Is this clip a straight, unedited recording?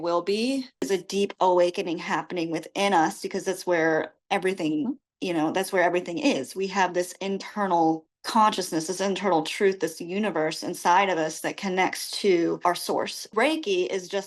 no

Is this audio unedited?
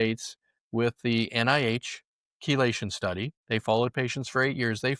no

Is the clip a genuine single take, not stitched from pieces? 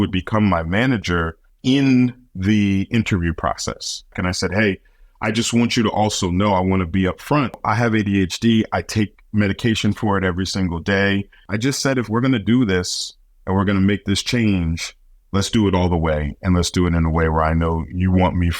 no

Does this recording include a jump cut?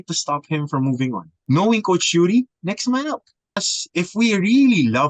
yes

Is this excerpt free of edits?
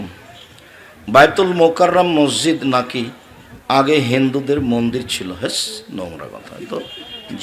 yes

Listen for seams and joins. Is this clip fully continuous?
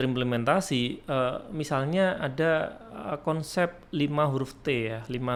yes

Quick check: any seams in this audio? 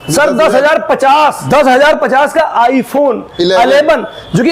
yes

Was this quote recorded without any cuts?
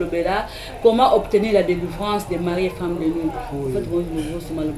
yes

